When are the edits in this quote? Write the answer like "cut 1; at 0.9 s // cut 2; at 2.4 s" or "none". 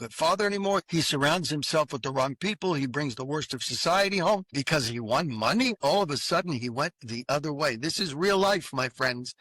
cut 1; at 0.9 s // cut 2; at 4.6 s